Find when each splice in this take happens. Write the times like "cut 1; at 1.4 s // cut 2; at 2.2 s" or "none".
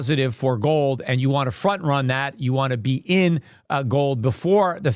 none